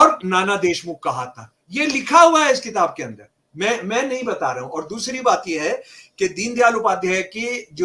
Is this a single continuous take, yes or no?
yes